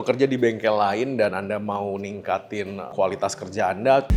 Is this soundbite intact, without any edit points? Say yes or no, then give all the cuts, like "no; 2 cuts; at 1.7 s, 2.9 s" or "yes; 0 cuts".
yes; 0 cuts